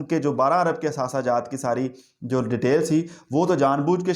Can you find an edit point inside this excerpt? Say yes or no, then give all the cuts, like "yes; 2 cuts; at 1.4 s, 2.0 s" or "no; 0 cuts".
no; 0 cuts